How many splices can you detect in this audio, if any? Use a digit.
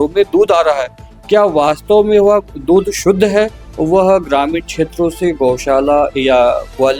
1